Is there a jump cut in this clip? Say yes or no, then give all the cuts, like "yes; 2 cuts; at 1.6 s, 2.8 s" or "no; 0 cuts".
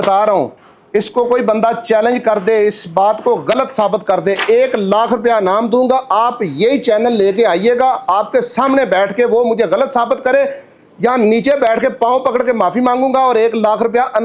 no; 0 cuts